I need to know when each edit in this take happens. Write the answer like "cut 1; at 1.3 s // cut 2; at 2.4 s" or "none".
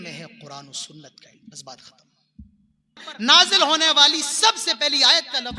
cut 1; at 3.1 s

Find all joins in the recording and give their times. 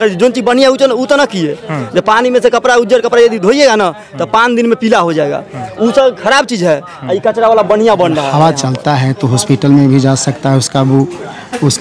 cut 1; at 8.3 s

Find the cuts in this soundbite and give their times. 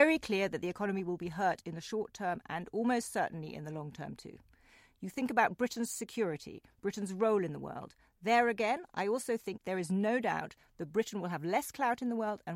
cut 1; at 9.5 s

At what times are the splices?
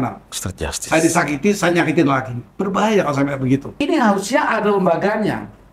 cut 1; at 3.7 s

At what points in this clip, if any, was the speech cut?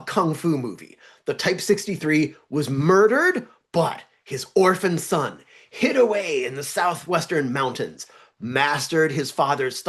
none

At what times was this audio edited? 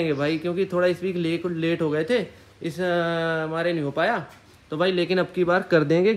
none

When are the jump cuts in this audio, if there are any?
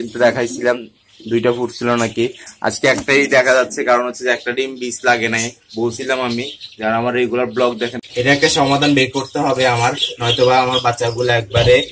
cut 1; at 8.0 s

